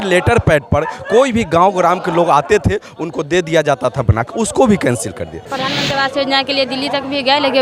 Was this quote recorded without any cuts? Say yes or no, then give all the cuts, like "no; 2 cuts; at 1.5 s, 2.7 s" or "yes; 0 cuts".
no; 1 cut; at 5.5 s